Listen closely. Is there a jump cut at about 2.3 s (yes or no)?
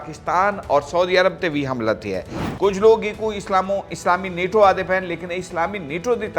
yes